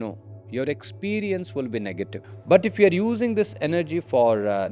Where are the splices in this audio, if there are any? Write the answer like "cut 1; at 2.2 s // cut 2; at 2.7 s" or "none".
cut 1; at 2.3 s

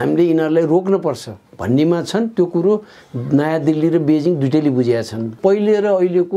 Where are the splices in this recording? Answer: cut 1; at 5.4 s

